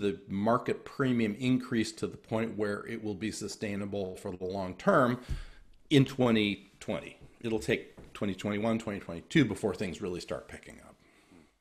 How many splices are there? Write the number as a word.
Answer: zero